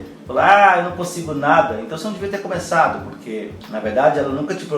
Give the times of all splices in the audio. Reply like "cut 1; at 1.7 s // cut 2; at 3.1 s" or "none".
cut 1; at 3.6 s